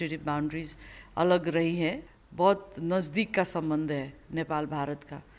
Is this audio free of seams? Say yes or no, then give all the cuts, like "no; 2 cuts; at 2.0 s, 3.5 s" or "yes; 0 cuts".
no; 1 cut; at 2.1 s